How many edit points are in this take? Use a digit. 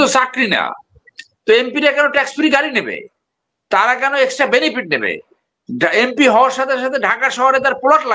0